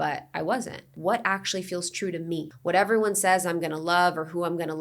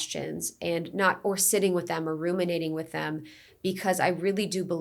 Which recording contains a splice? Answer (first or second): first